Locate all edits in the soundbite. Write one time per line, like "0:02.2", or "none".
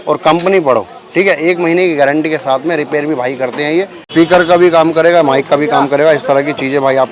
0:04.0